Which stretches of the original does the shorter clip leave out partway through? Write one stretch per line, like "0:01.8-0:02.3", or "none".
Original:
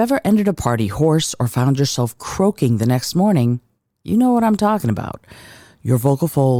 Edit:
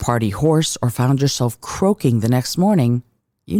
none